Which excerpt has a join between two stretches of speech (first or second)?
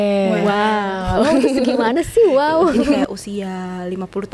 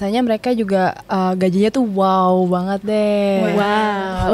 first